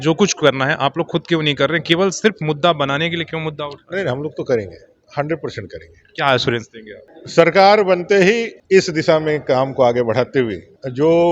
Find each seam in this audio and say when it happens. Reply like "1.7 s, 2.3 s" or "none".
none